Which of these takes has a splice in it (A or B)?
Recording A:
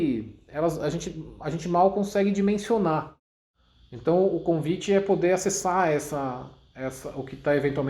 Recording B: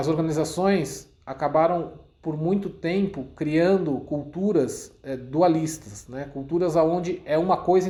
A